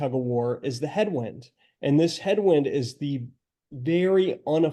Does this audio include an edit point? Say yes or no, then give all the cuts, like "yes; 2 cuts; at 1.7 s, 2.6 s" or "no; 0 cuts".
no; 0 cuts